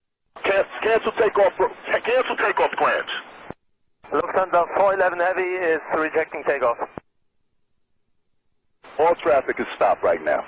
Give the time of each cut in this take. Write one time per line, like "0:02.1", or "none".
0:09.4